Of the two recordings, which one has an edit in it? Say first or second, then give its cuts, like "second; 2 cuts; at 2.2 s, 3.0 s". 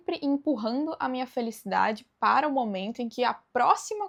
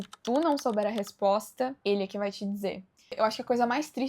second; 2 cuts; at 1.8 s, 3.1 s